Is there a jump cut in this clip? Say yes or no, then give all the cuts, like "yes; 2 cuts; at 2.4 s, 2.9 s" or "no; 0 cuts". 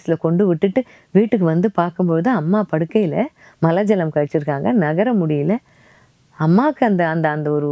no; 0 cuts